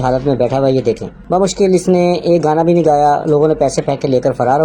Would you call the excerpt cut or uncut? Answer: uncut